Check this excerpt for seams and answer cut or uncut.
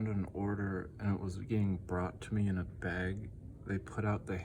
uncut